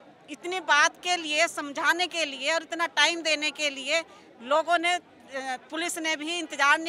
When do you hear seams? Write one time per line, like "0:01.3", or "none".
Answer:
none